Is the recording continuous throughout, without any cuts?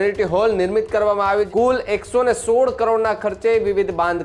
no; 1 cut; at 1.5 s

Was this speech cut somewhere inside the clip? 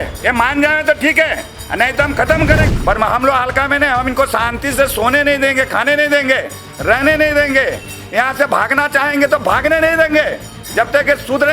yes; 1 cut; at 2.6 s

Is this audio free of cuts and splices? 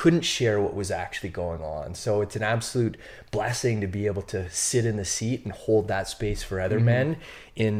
yes; 0 cuts

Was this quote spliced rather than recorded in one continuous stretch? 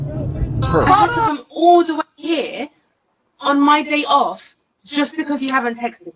yes; 1 cut; at 1.3 s

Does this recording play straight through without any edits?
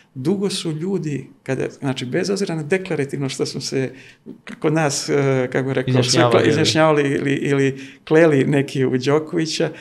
yes; 0 cuts

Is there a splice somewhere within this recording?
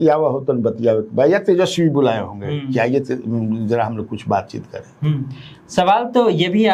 no; 0 cuts

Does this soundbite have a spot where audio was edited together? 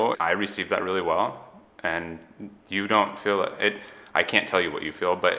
no; 0 cuts

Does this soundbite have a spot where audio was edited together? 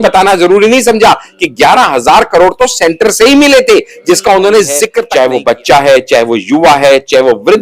yes; 1 cut; at 5.0 s

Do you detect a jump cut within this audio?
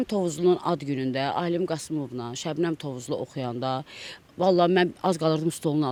no; 0 cuts

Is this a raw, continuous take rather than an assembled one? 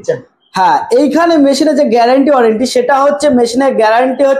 yes; 0 cuts

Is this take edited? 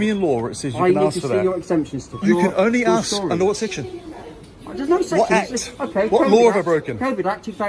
yes; 1 cut; at 2.1 s

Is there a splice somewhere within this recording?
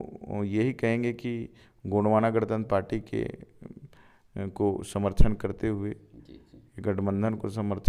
no; 0 cuts

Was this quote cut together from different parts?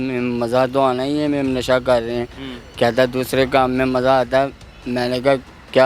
no; 0 cuts

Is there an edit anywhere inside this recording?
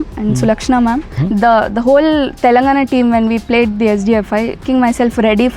yes; 2 cuts; at 1.1 s, 4.6 s

